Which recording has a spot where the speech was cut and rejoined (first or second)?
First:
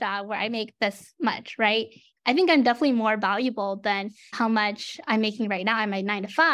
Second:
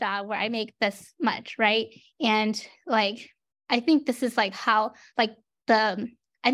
first